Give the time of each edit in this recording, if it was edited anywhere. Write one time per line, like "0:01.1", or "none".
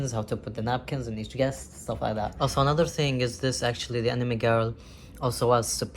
0:02.3